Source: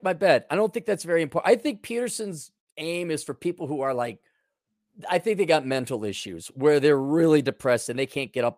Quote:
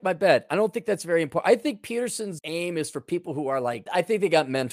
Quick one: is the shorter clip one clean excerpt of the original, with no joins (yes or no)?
no